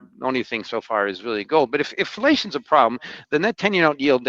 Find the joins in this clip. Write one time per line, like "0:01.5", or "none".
none